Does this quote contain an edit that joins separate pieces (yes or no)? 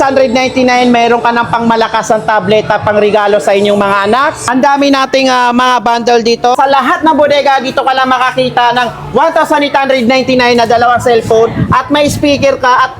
yes